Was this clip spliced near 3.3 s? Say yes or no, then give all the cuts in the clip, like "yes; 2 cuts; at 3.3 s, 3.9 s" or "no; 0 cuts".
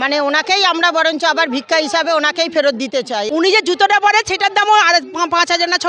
yes; 1 cut; at 3.3 s